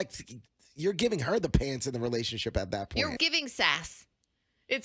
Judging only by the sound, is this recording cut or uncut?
cut